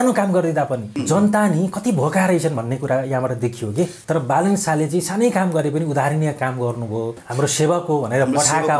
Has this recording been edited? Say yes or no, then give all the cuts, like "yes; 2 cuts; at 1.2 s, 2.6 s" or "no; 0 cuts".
yes; 3 cuts; at 0.9 s, 4.0 s, 7.2 s